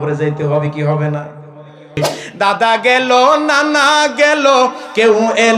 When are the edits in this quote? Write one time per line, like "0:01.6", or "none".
0:02.2